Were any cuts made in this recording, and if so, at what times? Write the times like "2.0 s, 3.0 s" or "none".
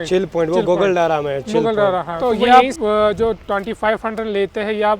2.1 s